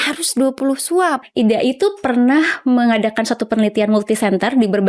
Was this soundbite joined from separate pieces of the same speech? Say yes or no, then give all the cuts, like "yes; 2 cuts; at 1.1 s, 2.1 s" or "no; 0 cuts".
yes; 1 cut; at 1.3 s